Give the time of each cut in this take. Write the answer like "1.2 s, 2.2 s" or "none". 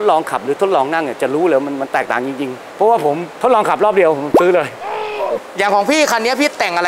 3.3 s, 5.4 s